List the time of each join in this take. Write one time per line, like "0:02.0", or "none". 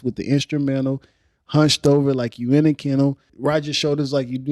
0:03.3